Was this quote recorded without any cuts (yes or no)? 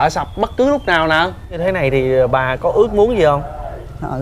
no